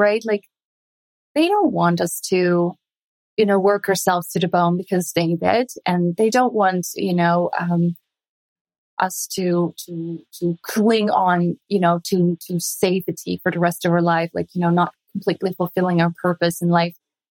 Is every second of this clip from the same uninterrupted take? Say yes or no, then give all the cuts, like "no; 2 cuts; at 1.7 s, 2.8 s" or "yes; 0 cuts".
yes; 0 cuts